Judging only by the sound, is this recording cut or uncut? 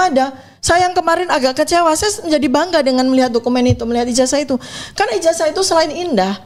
uncut